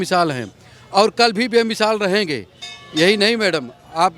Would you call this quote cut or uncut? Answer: uncut